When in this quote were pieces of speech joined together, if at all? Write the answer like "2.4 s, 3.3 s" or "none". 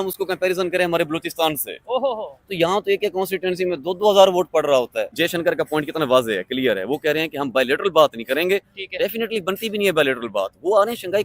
5.1 s